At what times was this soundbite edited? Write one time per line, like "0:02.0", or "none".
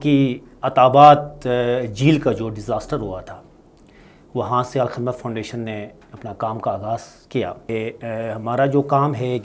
0:07.7